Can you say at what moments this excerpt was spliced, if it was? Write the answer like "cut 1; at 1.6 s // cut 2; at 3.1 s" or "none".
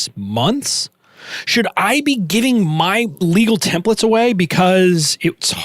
cut 1; at 3.2 s